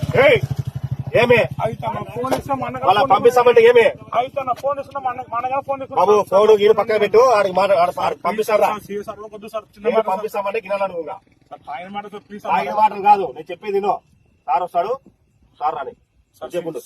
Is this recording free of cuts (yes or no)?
yes